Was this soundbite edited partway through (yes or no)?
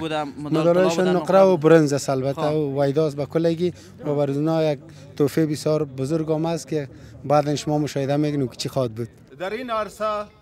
yes